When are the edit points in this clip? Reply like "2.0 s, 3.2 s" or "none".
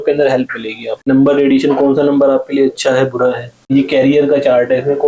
1.1 s, 3.7 s